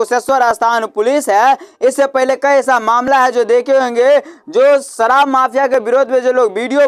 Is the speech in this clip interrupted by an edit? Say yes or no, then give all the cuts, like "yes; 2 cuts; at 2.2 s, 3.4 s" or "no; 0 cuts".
no; 0 cuts